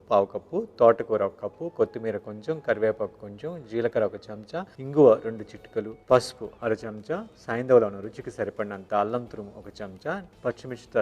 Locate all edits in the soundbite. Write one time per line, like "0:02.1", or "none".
none